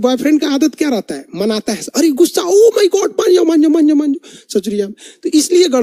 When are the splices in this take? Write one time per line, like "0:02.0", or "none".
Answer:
none